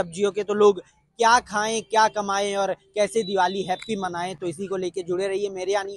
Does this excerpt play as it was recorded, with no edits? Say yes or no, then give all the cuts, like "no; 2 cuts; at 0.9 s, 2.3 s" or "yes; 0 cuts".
yes; 0 cuts